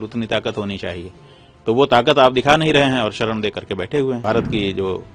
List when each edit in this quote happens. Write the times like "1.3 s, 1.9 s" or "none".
4.2 s